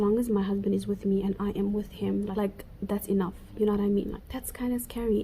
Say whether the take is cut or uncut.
cut